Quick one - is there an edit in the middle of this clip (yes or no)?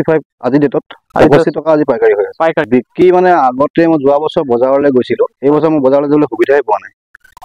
yes